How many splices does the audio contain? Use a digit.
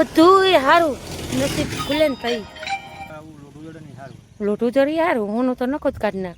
1